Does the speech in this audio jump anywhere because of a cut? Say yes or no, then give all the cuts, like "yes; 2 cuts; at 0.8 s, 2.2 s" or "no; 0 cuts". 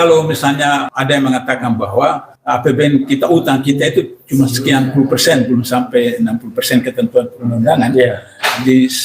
yes; 2 cuts; at 0.9 s, 2.3 s